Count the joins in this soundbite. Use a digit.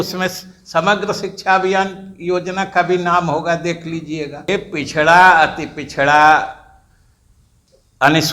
1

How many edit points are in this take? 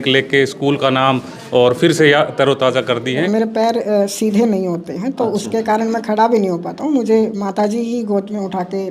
1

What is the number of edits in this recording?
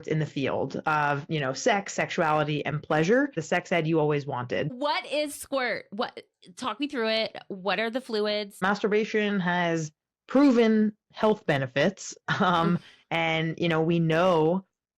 3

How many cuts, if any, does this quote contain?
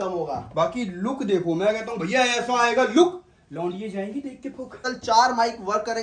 1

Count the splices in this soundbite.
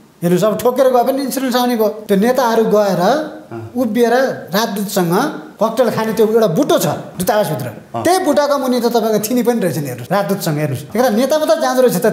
4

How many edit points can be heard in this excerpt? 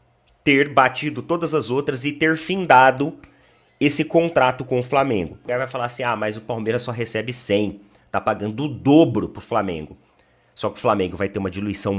1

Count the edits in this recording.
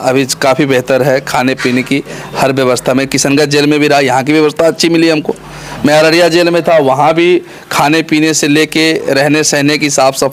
0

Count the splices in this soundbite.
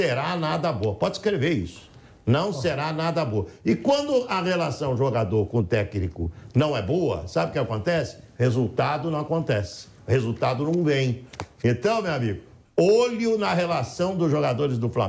0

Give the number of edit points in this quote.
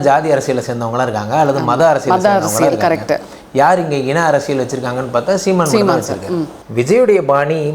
1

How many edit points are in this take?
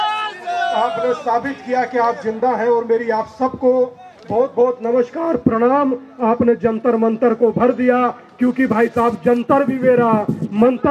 0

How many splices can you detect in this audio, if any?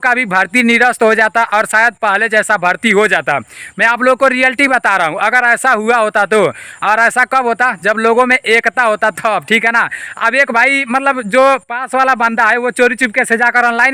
0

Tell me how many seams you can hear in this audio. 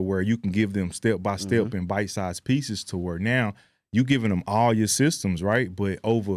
0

